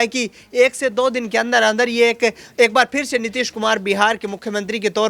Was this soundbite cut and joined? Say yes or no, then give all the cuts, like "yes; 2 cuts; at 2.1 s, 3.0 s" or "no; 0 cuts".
no; 0 cuts